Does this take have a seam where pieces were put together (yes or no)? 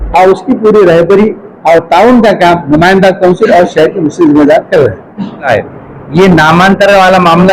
yes